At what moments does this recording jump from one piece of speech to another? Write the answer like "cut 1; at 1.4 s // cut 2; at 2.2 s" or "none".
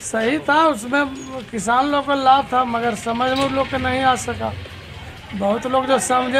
none